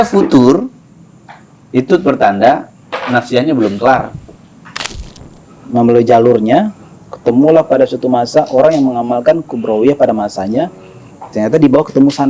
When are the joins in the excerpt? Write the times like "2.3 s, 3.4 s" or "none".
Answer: 5.0 s